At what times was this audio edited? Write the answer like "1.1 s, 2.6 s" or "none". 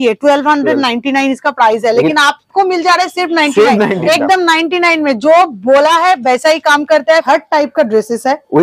4.0 s, 7.2 s